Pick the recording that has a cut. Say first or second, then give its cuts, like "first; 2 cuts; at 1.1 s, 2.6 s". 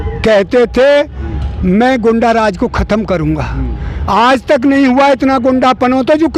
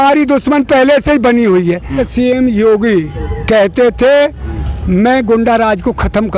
second; 1 cut; at 2.1 s